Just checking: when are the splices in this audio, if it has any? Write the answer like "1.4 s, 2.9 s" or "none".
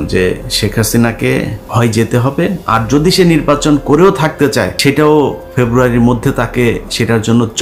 1.6 s, 4.7 s